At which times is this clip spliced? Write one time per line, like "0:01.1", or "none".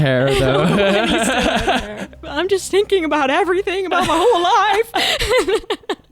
0:02.2